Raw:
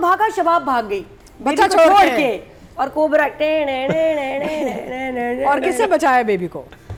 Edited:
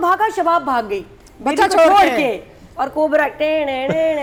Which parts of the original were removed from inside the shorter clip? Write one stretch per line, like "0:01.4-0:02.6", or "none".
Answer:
none